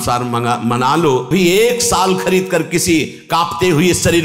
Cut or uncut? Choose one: cut